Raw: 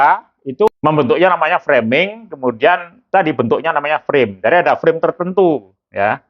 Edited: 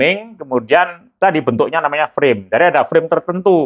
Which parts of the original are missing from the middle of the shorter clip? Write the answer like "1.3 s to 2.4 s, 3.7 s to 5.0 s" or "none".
none